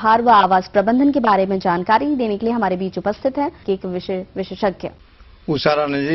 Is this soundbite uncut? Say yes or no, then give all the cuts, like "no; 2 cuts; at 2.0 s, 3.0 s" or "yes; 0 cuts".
yes; 0 cuts